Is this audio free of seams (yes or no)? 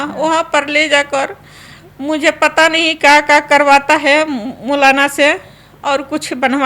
yes